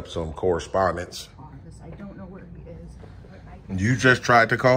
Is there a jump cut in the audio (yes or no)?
yes